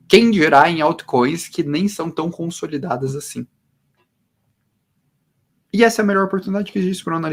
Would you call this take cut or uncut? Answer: uncut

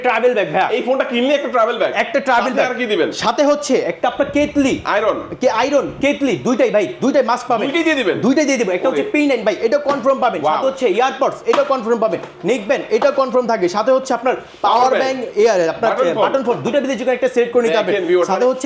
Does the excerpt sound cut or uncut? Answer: uncut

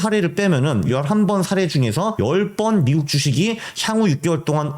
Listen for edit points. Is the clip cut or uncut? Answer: cut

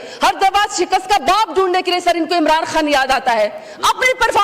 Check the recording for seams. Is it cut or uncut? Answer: uncut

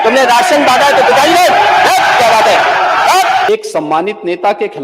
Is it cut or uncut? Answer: cut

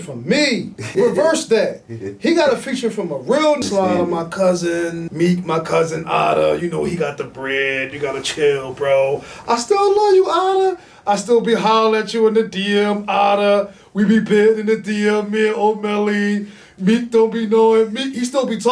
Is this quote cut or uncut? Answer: cut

